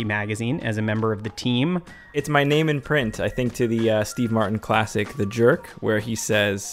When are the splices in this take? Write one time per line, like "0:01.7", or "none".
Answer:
0:02.2